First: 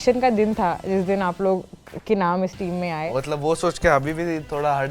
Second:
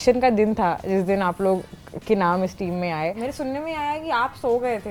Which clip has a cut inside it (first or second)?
first